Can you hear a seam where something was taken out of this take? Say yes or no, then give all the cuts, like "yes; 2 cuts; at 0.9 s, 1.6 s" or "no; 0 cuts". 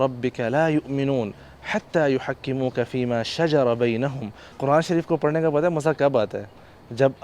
yes; 1 cut; at 4.6 s